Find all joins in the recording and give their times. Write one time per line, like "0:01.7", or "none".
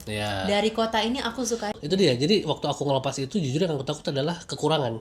0:01.7